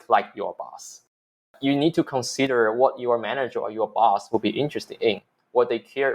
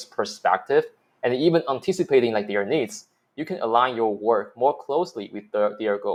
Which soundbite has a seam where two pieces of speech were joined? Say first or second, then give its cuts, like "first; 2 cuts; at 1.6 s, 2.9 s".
first; 1 cut; at 1.5 s